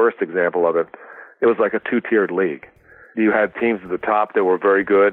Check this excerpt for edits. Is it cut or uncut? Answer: cut